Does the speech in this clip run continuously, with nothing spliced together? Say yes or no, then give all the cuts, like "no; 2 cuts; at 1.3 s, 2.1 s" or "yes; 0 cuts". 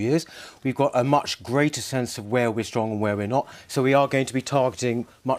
no; 1 cut; at 2.7 s